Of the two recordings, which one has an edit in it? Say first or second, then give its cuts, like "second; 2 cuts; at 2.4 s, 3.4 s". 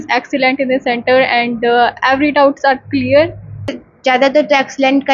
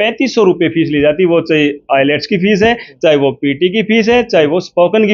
first; 1 cut; at 3.9 s